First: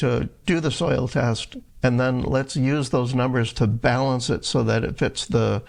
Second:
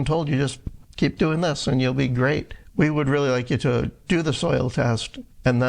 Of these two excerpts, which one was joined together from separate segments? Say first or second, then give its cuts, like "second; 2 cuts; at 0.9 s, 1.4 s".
second; 1 cut; at 2.6 s